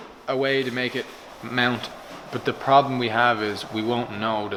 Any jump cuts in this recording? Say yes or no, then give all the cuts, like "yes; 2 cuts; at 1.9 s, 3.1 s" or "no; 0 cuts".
no; 0 cuts